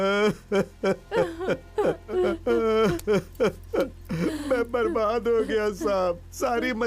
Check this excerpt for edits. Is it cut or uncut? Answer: cut